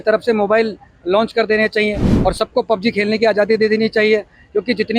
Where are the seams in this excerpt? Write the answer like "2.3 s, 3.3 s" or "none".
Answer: none